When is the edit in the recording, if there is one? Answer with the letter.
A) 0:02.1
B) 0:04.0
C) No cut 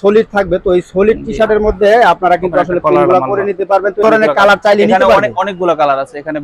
B